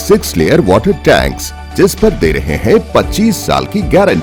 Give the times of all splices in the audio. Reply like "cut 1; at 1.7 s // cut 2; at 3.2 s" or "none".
none

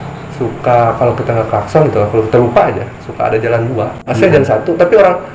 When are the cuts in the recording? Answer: cut 1; at 4.4 s

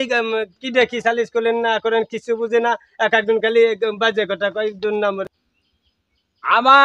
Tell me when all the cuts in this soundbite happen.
cut 1; at 5.3 s

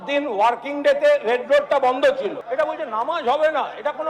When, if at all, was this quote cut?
cut 1; at 2.4 s

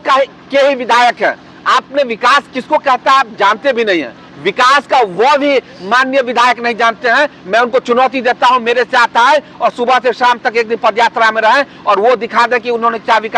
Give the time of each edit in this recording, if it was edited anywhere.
none

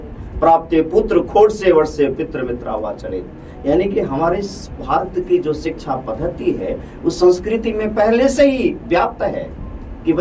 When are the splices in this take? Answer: none

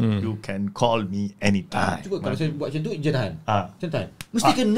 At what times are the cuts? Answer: cut 1; at 2.0 s

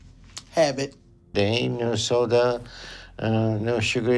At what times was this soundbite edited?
cut 1; at 1.3 s

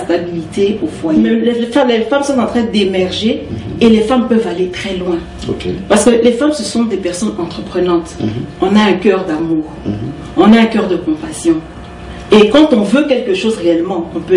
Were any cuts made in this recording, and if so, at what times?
cut 1; at 1.5 s

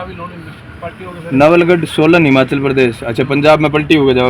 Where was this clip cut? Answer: none

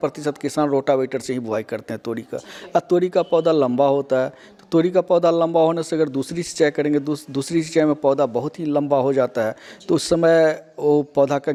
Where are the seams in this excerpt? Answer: none

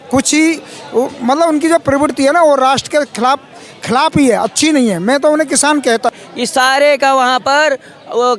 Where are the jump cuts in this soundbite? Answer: cut 1; at 6.1 s

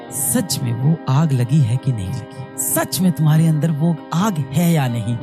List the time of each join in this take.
none

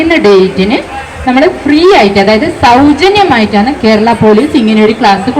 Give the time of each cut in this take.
none

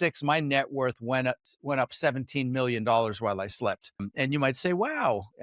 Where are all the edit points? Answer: cut 1; at 1.5 s // cut 2; at 4.1 s

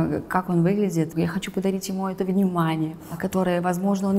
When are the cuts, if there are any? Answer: cut 1; at 1.1 s // cut 2; at 3.1 s

